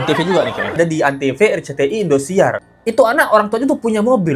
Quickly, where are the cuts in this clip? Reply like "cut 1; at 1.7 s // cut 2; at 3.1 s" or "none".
cut 1; at 0.8 s // cut 2; at 2.7 s

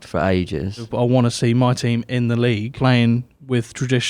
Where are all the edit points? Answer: cut 1; at 0.9 s // cut 2; at 2.7 s

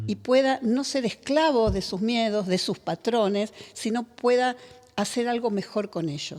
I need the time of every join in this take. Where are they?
none

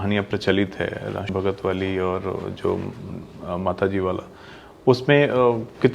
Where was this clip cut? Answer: cut 1; at 1.3 s

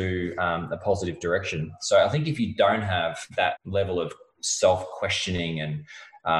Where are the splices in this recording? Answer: cut 1; at 1.7 s // cut 2; at 3.6 s

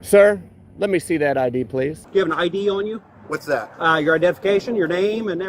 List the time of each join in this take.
cut 1; at 2.0 s

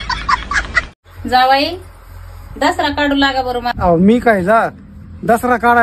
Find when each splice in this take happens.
cut 1; at 1.1 s

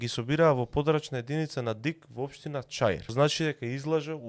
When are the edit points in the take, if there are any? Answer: cut 1; at 3.1 s

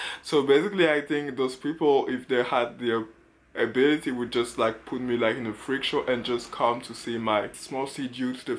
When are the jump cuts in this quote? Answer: cut 1; at 7.6 s

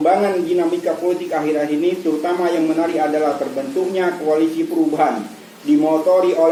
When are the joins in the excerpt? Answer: none

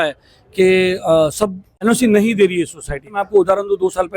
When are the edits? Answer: cut 1; at 1.6 s // cut 2; at 3.2 s

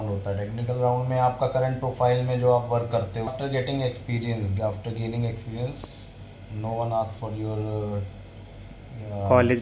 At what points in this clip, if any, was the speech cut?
cut 1; at 3.3 s

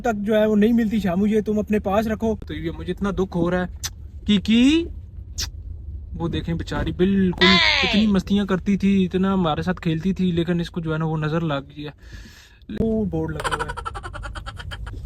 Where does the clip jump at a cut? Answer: cut 1; at 2.6 s // cut 2; at 12.8 s

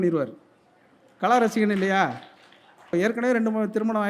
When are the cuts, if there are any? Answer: cut 1; at 2.9 s

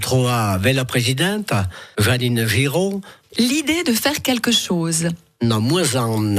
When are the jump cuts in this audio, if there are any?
cut 1; at 3.1 s

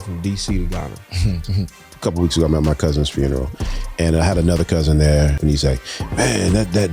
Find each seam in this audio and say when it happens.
cut 1; at 1.8 s // cut 2; at 5.4 s

